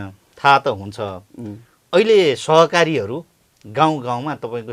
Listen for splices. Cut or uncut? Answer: uncut